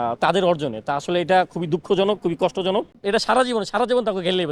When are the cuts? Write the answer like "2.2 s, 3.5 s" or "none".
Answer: 3.0 s